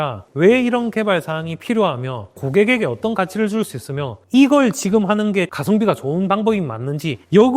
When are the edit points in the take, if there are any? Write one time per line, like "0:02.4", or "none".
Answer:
0:02.4
0:04.2
0:05.5